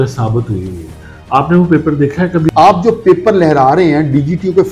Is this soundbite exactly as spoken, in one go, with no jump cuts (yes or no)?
no